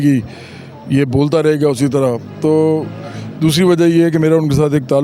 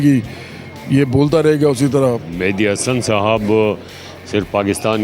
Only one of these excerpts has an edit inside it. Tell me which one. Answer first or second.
second